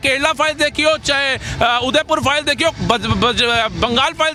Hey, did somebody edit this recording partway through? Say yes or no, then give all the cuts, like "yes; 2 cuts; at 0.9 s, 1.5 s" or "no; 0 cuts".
no; 0 cuts